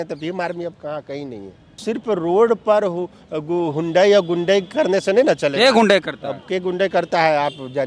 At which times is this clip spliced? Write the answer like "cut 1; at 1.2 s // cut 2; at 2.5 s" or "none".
cut 1; at 1.8 s